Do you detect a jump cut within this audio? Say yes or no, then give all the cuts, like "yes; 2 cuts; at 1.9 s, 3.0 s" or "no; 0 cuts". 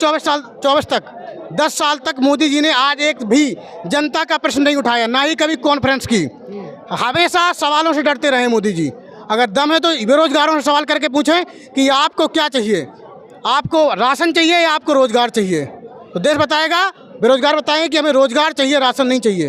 no; 0 cuts